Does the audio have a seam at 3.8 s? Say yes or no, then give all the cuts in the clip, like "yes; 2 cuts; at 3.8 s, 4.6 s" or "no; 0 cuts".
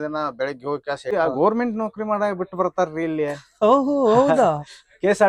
no; 1 cut; at 1.1 s